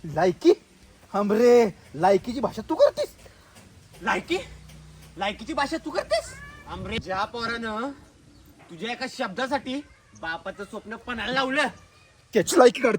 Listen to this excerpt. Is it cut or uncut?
cut